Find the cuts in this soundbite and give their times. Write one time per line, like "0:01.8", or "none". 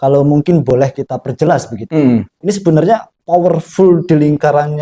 0:02.3